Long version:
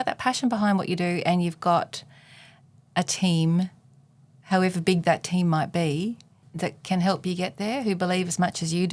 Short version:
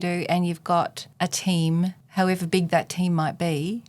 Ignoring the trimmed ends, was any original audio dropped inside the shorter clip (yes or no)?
yes